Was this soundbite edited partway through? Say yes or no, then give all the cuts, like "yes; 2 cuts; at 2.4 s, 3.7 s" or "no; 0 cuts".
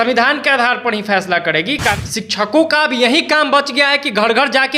yes; 1 cut; at 2.0 s